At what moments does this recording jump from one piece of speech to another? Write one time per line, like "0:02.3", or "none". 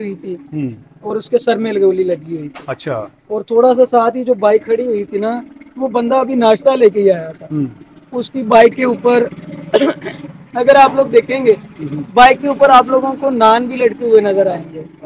none